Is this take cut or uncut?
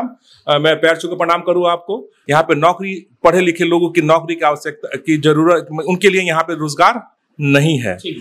cut